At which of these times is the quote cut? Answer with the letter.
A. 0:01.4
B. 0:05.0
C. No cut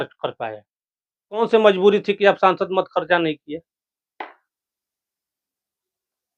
A